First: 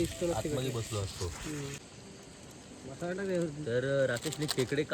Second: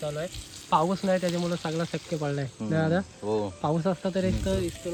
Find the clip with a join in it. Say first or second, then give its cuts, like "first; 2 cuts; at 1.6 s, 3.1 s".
first; 1 cut; at 1.9 s